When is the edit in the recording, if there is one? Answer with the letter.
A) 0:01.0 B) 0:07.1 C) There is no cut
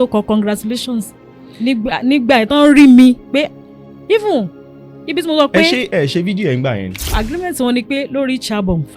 B